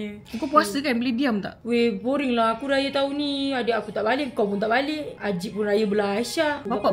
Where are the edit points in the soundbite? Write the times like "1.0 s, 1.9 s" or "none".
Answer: none